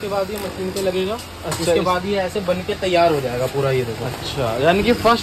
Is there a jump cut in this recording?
no; 0 cuts

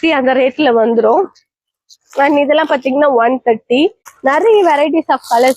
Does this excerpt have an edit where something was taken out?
yes; 1 cut; at 4.1 s

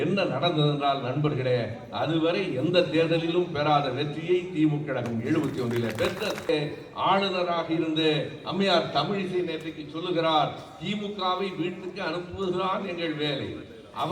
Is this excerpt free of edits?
no; 1 cut; at 6.5 s

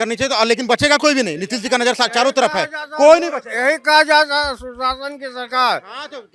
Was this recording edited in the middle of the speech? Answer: no; 0 cuts

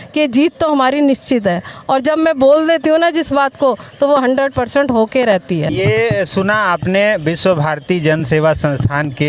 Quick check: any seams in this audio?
no; 0 cuts

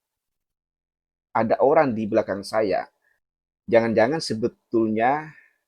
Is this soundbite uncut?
yes; 0 cuts

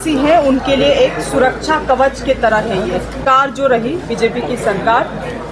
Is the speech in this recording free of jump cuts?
no; 1 cut; at 3.2 s

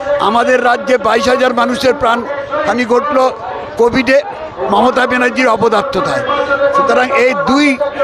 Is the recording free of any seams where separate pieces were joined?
yes; 0 cuts

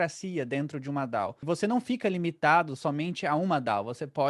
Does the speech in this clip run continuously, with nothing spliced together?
no; 1 cut; at 1.4 s

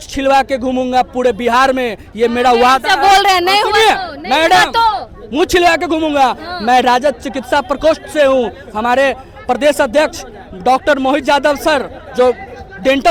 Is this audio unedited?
yes; 0 cuts

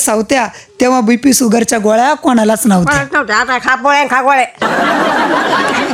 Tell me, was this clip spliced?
no; 0 cuts

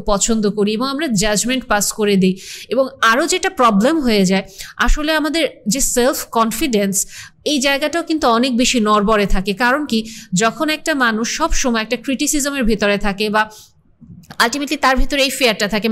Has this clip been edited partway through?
no; 0 cuts

